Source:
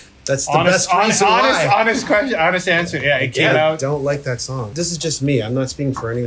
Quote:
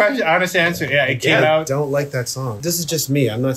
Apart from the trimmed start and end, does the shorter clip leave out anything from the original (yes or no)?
no